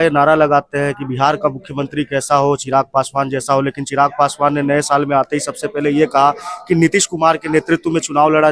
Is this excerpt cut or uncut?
uncut